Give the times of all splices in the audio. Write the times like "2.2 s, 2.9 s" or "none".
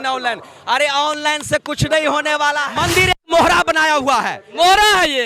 2.7 s